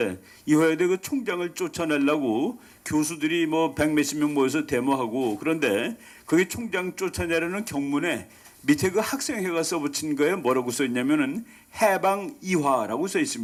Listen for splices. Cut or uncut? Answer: uncut